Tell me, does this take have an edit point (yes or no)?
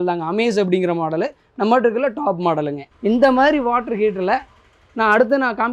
yes